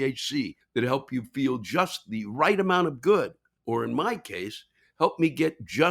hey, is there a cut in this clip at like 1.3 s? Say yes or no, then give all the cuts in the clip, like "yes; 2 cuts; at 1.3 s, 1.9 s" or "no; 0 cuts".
no; 1 cut; at 3.5 s